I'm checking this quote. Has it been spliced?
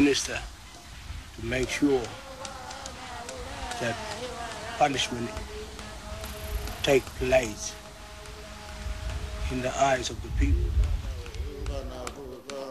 no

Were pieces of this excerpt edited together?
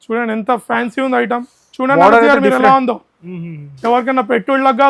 no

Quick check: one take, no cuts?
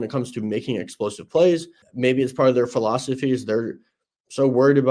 no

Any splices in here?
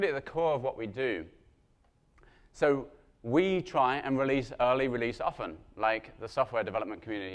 yes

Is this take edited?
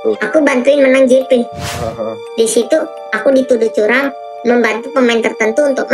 yes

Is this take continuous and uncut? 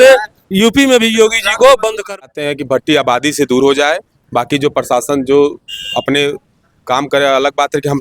no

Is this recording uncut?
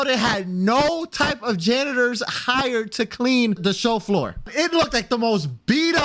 no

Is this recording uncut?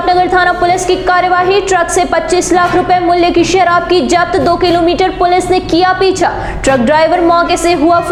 yes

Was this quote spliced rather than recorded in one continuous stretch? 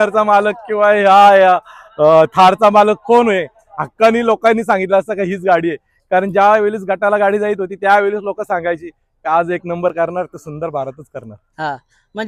no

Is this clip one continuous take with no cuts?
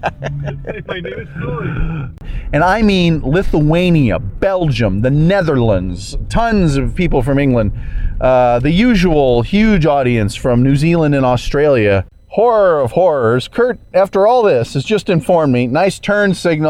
no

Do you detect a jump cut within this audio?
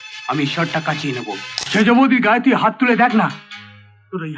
yes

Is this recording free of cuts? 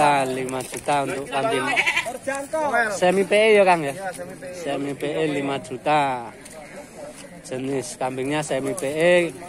yes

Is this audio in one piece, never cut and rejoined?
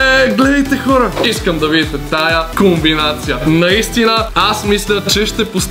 no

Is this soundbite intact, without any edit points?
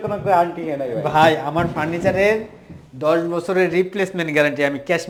yes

